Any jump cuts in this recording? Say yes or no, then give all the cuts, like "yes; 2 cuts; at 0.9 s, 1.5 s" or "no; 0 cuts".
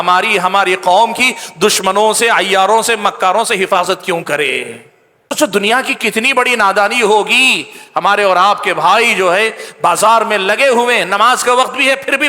yes; 1 cut; at 5.3 s